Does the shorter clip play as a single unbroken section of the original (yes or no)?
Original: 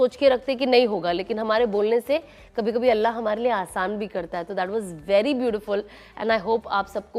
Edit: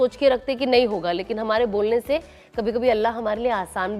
yes